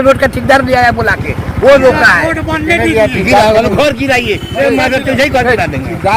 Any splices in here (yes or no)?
no